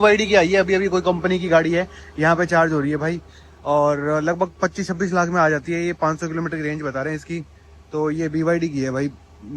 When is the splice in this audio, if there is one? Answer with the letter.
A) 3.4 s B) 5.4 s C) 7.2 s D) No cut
D